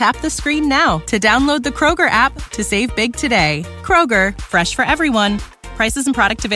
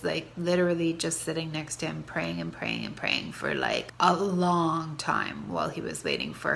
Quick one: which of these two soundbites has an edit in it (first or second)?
second